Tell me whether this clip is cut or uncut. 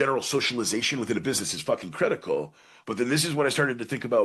uncut